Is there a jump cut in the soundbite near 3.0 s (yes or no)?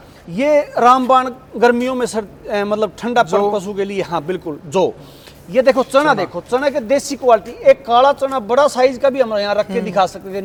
no